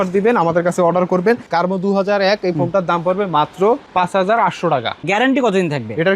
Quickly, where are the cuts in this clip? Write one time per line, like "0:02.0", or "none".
0:01.5
0:05.0